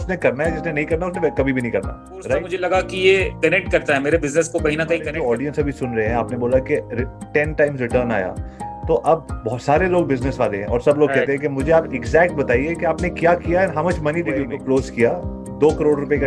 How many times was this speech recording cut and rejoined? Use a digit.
3